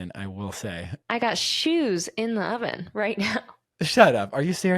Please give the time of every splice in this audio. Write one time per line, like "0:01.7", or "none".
0:01.1
0:03.6

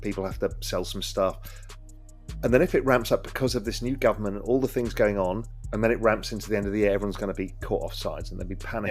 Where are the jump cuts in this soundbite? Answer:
0:05.6

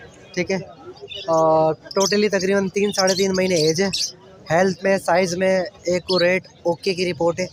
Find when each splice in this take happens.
none

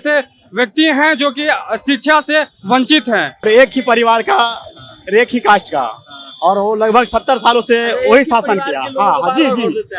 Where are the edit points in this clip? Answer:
0:03.4

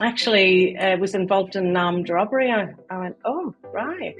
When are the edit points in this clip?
none

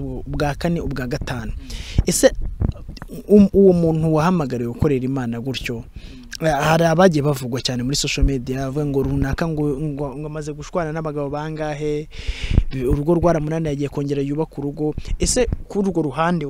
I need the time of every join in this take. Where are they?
none

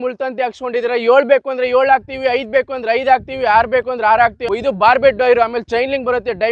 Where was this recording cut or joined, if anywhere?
0:04.4

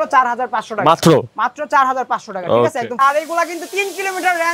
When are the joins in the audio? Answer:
0:03.0

